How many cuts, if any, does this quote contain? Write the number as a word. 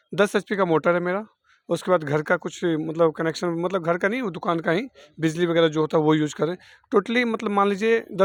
zero